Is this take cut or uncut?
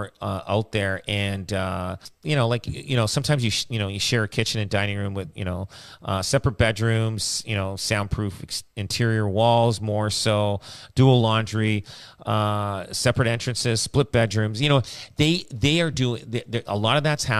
cut